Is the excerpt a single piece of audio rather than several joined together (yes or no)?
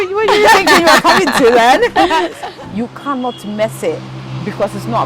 no